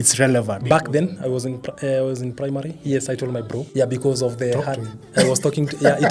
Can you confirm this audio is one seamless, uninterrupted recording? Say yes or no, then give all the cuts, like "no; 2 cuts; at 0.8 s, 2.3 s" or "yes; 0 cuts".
no; 1 cut; at 3.7 s